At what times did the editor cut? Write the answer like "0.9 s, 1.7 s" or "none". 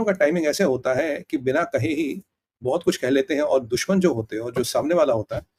none